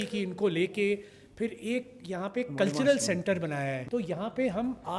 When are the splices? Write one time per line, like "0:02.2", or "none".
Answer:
0:03.8